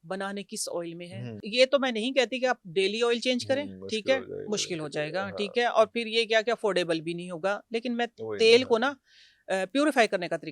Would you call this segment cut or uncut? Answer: cut